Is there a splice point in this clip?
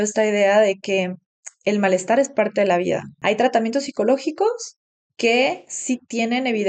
yes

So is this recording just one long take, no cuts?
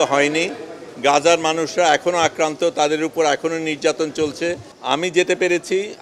no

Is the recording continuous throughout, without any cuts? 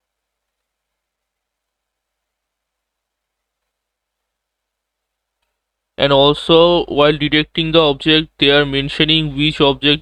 yes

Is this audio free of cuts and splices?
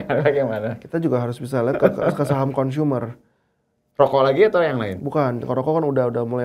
yes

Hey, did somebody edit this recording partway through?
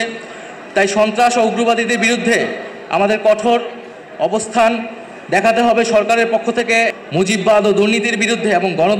yes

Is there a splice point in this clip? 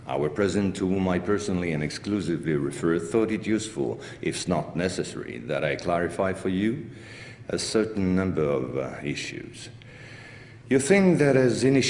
yes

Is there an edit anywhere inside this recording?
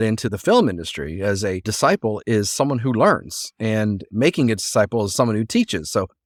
no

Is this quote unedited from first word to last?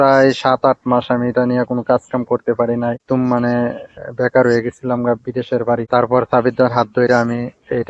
no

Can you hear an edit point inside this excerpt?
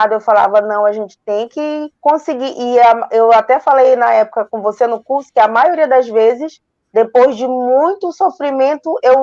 no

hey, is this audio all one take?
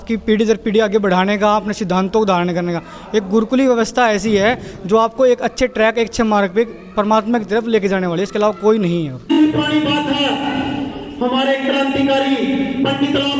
no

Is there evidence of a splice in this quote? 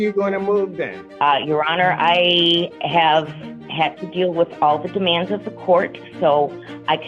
yes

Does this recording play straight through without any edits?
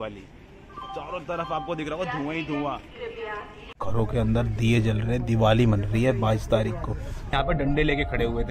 no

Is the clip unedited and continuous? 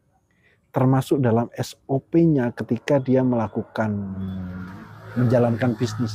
no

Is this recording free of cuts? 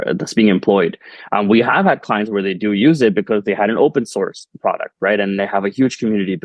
yes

